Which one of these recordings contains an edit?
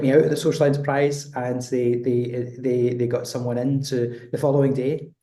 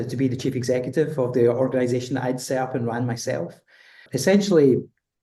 second; 1 cut; at 4.1 s

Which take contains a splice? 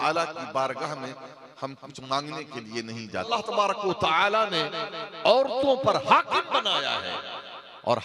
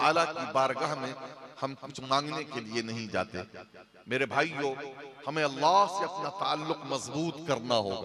first; 1 cut; at 3.3 s

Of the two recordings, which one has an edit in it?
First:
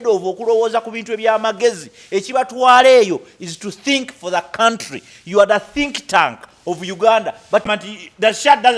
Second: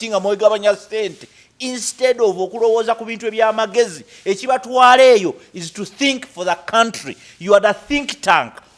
first; 1 cut; at 7.7 s

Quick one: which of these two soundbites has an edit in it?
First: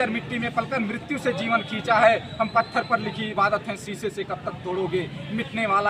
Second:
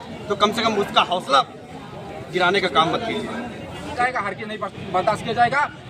second; 1 cut; at 4.0 s

